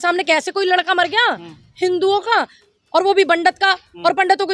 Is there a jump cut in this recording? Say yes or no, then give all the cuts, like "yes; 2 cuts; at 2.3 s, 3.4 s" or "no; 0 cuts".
no; 0 cuts